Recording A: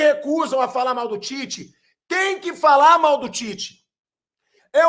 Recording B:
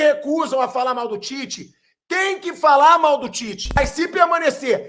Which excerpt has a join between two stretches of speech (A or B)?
B